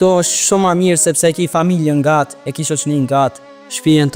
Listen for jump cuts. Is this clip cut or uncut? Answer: uncut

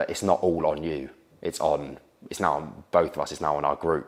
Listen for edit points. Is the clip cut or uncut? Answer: uncut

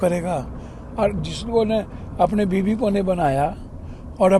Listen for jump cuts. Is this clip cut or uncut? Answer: uncut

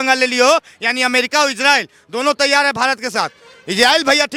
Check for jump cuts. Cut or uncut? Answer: uncut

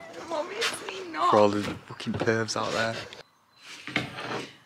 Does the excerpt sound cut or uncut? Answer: uncut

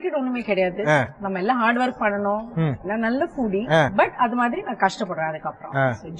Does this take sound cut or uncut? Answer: cut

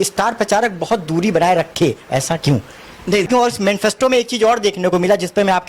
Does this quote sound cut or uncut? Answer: cut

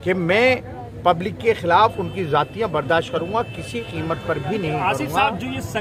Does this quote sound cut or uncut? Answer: uncut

